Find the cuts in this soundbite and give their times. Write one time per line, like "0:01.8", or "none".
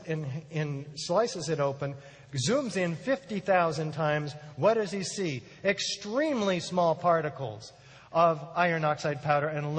0:02.0